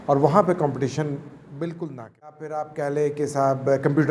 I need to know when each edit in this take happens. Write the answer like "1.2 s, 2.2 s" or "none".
2.5 s